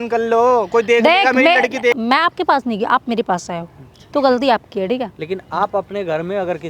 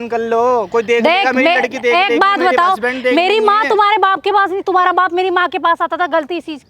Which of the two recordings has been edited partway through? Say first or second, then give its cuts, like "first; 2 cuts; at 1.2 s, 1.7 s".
first; 1 cut; at 1.9 s